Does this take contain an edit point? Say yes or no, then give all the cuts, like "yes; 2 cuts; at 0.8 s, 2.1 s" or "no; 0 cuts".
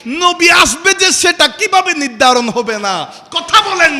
no; 0 cuts